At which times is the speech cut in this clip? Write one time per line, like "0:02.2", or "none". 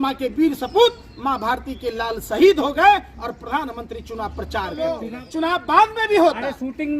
0:04.7